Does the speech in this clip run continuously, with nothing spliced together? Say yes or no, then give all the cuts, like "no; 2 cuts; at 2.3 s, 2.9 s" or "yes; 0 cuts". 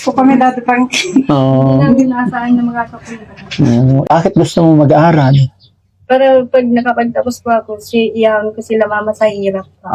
no; 1 cut; at 4.0 s